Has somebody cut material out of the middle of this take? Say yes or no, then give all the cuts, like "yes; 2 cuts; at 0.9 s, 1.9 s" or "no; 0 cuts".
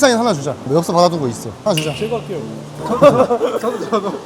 no; 0 cuts